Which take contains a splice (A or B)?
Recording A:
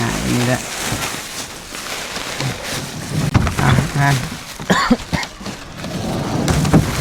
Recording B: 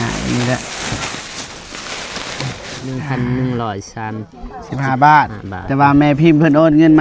B